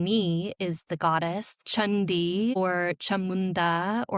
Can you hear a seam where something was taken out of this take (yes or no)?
yes